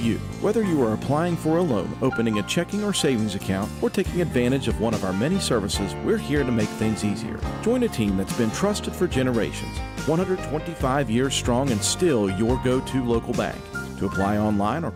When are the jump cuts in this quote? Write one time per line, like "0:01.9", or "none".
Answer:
none